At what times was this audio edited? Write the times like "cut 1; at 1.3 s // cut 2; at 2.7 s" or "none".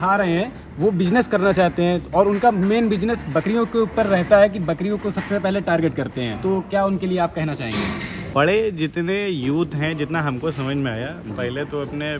cut 1; at 6.3 s // cut 2; at 8.1 s